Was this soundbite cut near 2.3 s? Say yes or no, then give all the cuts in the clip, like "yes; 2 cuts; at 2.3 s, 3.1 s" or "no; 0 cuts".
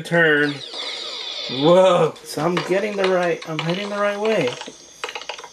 yes; 1 cut; at 2.3 s